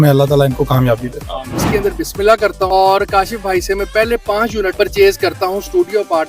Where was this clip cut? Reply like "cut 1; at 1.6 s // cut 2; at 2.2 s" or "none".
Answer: cut 1; at 1.7 s // cut 2; at 2.7 s // cut 3; at 4.7 s